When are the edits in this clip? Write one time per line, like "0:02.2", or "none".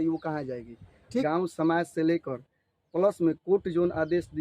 0:01.2